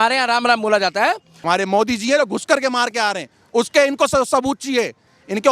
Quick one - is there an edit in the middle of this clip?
yes; 1 cut; at 1.3 s

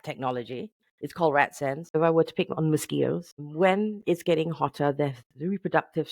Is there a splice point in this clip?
yes; 2 cuts; at 1.9 s, 3.4 s

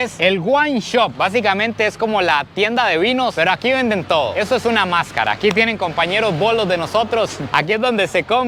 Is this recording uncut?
yes; 0 cuts

